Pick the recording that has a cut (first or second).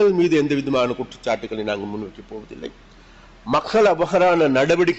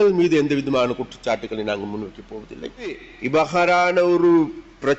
second